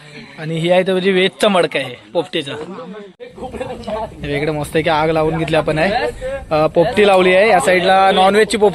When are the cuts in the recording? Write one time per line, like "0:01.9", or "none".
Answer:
0:03.1